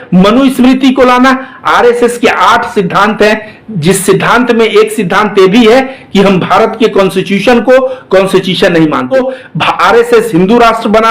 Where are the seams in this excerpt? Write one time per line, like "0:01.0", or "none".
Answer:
0:09.1